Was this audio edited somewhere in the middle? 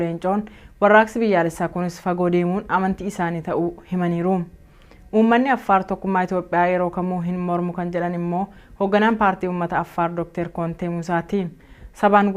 yes; 1 cut; at 6.5 s

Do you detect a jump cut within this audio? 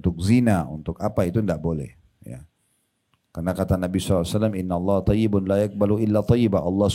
no; 0 cuts

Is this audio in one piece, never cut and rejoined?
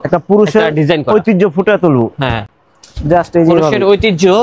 yes; 0 cuts

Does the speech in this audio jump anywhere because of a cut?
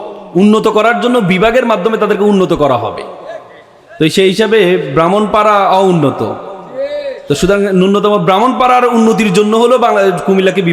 no; 0 cuts

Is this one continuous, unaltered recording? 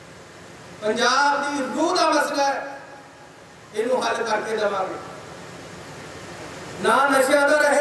yes; 0 cuts

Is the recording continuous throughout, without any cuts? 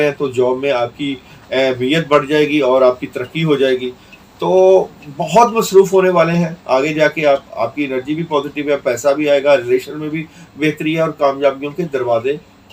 yes; 0 cuts

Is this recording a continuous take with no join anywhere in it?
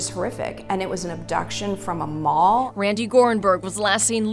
no; 1 cut; at 2.7 s

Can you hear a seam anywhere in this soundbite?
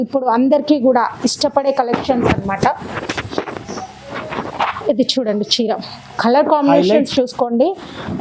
no; 0 cuts

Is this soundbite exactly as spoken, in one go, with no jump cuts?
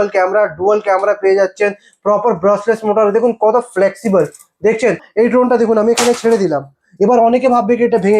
no; 1 cut; at 5.0 s

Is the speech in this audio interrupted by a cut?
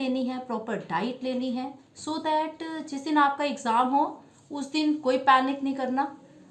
no; 0 cuts

